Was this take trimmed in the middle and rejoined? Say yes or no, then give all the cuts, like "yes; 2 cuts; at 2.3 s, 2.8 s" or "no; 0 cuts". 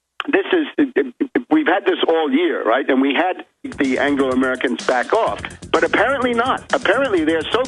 no; 0 cuts